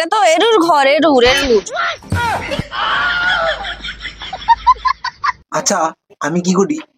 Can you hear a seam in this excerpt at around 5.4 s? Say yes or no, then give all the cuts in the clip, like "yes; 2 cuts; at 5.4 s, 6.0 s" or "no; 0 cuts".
yes; 1 cut; at 5.4 s